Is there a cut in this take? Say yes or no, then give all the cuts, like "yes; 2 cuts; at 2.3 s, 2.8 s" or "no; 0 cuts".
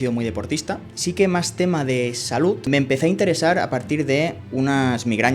yes; 2 cuts; at 0.9 s, 2.7 s